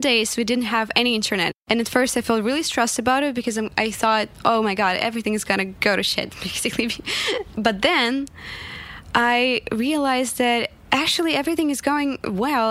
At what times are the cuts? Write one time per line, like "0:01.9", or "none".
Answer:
0:01.5
0:05.7
0:07.5